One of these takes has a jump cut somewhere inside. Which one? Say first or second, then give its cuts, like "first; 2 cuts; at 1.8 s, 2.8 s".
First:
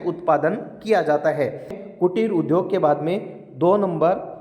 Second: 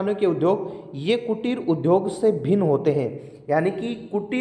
first; 1 cut; at 1.8 s